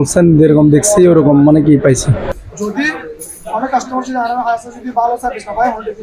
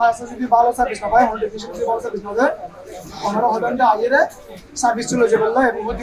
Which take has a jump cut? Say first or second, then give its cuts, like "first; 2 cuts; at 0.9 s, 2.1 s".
first; 1 cut; at 2.3 s